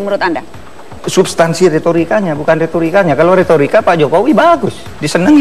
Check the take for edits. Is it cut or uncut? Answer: uncut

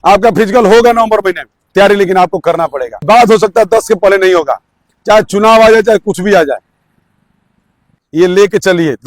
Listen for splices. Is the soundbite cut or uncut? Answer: cut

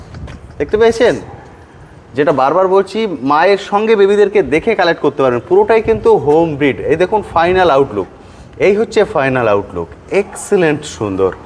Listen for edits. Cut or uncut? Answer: uncut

